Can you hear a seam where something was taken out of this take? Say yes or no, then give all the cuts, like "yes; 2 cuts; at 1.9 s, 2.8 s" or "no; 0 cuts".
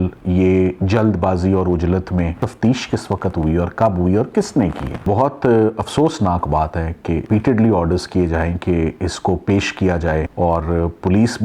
yes; 4 cuts; at 2.4 s, 5.0 s, 7.2 s, 10.3 s